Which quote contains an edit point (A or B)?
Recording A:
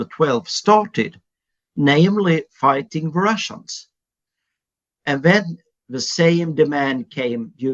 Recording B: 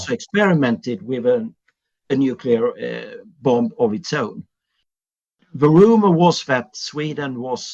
B